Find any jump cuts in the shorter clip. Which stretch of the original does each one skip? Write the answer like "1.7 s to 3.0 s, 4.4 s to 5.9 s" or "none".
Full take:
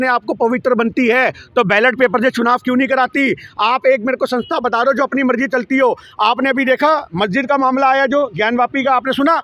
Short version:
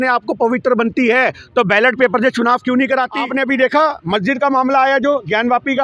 3.2 s to 6.2 s